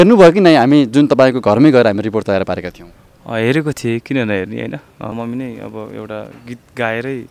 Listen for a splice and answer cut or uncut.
cut